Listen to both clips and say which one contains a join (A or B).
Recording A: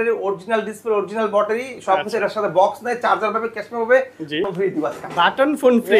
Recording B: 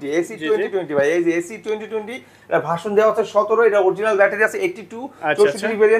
A